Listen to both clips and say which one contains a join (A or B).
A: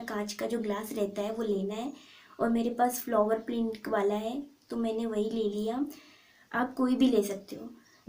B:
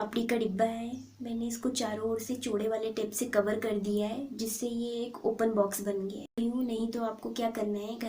B